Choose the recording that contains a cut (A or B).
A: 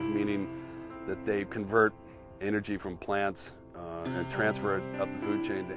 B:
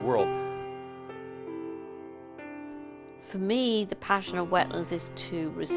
B